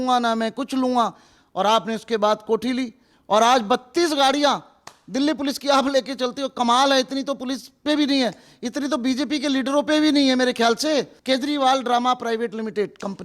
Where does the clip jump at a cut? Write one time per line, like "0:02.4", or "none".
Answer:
0:11.2